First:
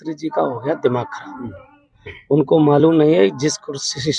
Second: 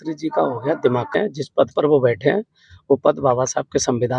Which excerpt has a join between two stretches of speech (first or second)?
second